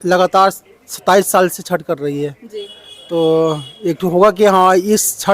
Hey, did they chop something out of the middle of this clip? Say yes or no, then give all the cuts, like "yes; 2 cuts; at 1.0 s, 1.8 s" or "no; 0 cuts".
no; 0 cuts